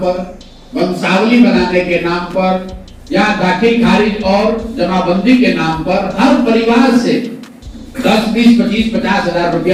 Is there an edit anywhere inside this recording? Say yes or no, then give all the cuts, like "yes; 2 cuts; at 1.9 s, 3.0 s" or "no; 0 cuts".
no; 0 cuts